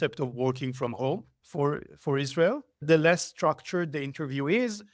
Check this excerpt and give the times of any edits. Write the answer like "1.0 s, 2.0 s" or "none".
1.4 s, 2.8 s